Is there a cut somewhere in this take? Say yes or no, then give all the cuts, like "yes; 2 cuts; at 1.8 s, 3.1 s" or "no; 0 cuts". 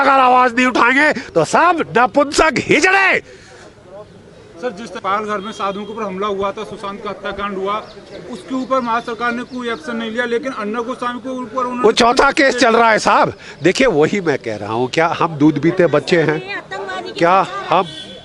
no; 0 cuts